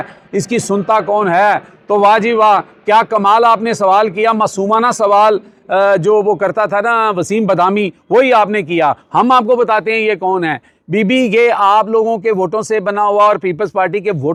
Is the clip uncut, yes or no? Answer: yes